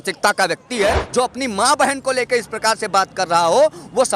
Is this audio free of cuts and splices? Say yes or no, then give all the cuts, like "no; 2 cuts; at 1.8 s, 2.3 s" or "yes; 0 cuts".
no; 1 cut; at 1.0 s